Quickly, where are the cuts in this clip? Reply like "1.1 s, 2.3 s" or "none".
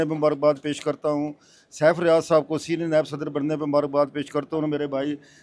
none